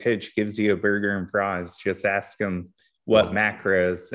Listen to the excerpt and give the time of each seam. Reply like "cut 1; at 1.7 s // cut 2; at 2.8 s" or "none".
none